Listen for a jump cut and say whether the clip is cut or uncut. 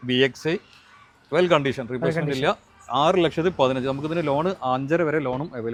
uncut